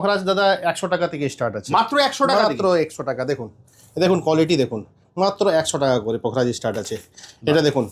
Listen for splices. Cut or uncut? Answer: uncut